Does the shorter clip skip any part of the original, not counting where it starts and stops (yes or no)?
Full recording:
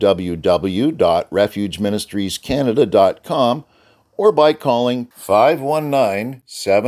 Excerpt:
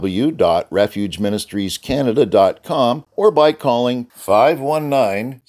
yes